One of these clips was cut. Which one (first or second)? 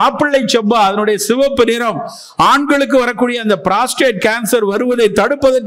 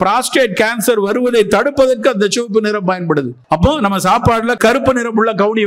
second